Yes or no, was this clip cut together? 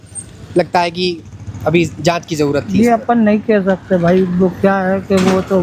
no